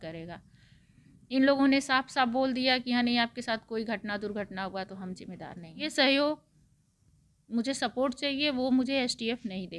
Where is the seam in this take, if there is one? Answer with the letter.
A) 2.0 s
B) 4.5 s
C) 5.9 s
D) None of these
C